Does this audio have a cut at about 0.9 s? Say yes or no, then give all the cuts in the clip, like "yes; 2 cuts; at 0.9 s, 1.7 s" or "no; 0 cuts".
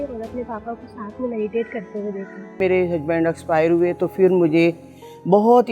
no; 1 cut; at 2.6 s